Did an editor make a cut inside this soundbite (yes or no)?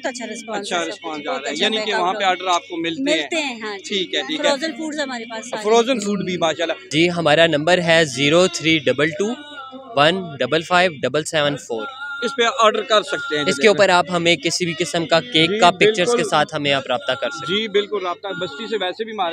no